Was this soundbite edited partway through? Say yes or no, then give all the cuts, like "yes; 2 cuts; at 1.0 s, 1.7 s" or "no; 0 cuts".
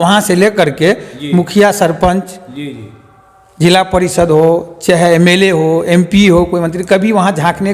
no; 0 cuts